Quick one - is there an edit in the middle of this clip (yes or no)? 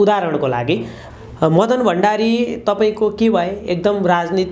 yes